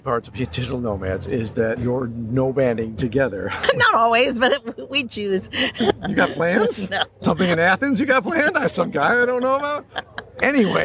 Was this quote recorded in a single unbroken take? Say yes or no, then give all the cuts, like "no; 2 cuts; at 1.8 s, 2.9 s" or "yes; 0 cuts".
no; 4 cuts; at 1.8 s, 3.5 s, 5.9 s, 7.1 s